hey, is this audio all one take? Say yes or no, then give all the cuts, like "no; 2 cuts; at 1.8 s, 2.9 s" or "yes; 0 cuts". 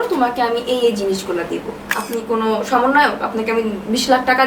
no; 1 cut; at 1.9 s